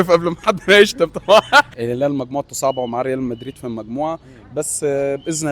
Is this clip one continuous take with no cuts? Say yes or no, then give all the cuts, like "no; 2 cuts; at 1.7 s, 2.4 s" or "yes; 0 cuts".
no; 1 cut; at 1.7 s